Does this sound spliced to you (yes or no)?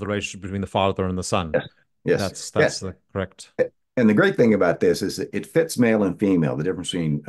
no